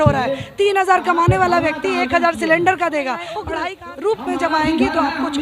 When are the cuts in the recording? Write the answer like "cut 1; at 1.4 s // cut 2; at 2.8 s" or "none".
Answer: cut 1; at 3.5 s